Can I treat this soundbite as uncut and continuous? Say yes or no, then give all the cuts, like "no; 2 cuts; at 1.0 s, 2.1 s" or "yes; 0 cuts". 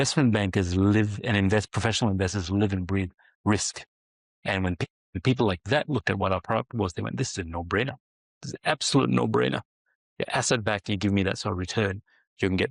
yes; 0 cuts